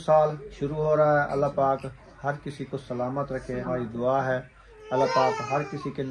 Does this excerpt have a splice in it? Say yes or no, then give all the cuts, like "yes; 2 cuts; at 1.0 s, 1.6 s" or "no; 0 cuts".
yes; 1 cut; at 3.7 s